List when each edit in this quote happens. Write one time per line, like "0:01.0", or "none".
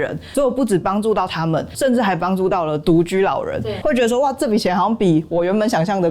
0:03.7